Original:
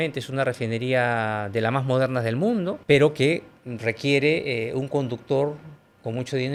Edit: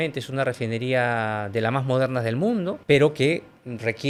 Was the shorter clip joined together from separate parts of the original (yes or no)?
no